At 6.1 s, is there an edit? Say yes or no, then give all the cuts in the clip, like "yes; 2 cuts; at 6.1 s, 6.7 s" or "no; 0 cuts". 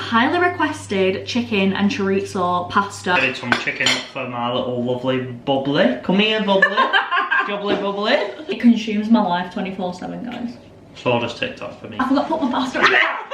no; 3 cuts; at 3.2 s, 8.5 s, 12.0 s